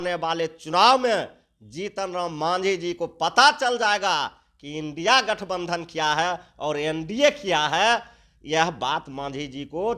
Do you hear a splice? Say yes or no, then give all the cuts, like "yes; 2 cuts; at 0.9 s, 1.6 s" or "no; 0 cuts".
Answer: no; 0 cuts